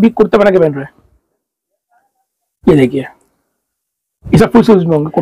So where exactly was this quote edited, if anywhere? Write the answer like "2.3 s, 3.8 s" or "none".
none